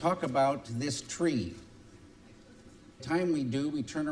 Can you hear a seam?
no; 0 cuts

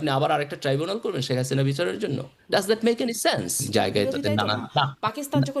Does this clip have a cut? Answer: yes; 1 cut; at 3.6 s

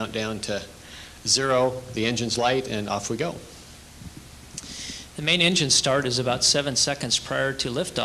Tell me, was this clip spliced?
yes; 1 cut; at 2.5 s

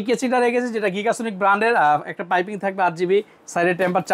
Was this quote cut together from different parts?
no; 0 cuts

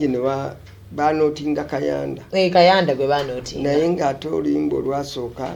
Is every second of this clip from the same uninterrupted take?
yes; 0 cuts

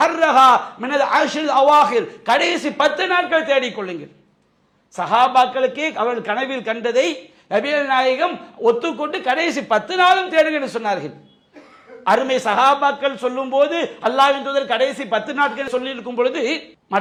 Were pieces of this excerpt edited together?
no; 0 cuts

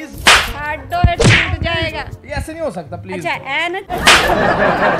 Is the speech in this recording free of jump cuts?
yes; 0 cuts

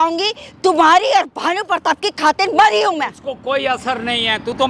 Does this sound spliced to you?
no; 0 cuts

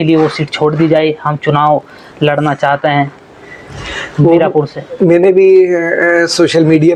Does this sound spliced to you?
no; 0 cuts

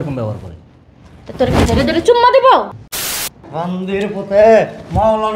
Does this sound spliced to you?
yes; 1 cut; at 2.8 s

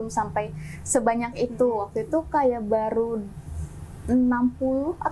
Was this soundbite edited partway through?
no; 0 cuts

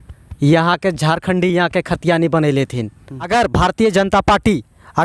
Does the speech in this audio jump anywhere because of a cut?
yes; 1 cut; at 3.3 s

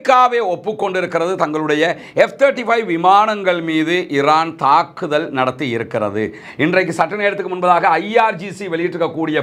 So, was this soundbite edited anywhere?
no; 0 cuts

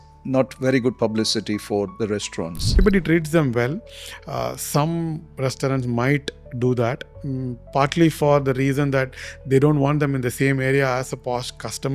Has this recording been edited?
yes; 1 cut; at 2.8 s

